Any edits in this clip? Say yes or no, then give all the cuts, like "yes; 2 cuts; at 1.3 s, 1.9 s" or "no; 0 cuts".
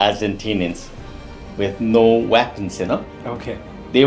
no; 0 cuts